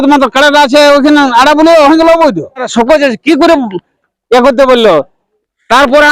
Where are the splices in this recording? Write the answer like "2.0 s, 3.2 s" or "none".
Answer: 2.7 s

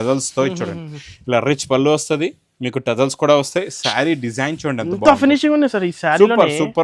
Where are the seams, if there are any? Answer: none

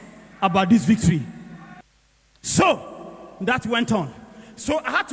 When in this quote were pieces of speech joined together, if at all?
none

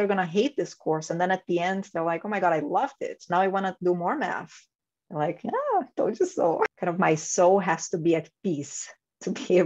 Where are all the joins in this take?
6.7 s

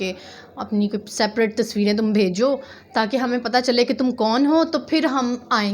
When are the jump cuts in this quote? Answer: none

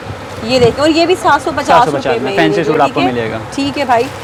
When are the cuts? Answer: none

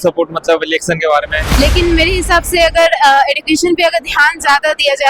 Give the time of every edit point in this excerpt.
1.4 s

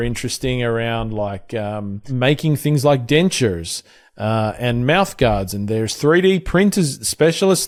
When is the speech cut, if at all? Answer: none

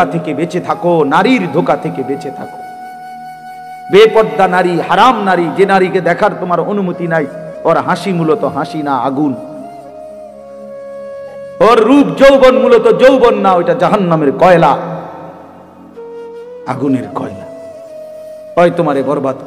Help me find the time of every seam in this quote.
15.3 s, 16.7 s

